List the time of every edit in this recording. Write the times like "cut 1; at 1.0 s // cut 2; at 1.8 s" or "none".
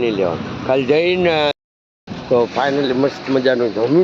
cut 1; at 1.5 s